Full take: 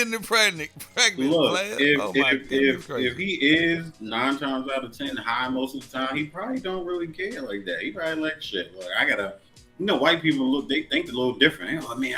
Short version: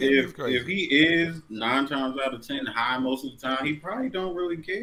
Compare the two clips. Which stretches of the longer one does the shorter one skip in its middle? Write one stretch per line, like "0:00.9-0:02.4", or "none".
none